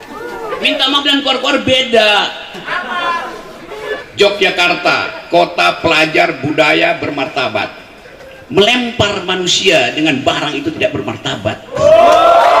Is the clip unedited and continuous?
no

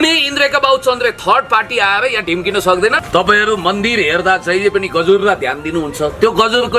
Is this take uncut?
no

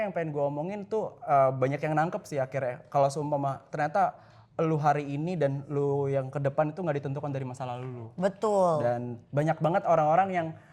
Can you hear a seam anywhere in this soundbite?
no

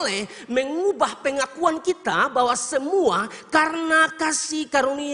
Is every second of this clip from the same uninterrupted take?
yes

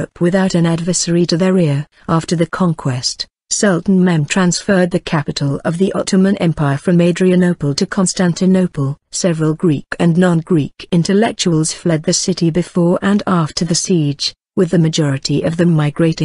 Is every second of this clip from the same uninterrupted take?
no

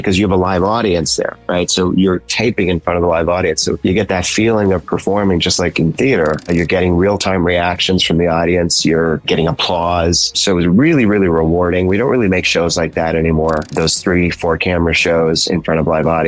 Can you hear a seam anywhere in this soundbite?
yes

